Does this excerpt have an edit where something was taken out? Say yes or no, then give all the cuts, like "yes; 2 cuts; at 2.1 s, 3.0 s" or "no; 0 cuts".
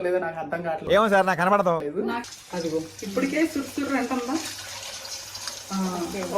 yes; 1 cut; at 2.2 s